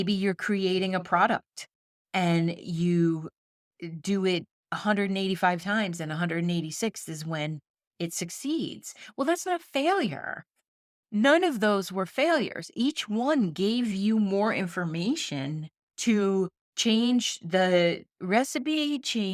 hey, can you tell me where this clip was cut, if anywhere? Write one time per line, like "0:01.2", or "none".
none